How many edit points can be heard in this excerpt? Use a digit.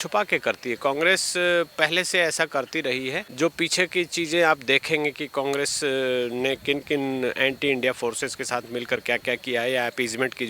1